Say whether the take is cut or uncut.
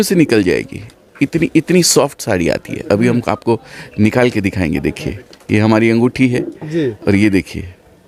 uncut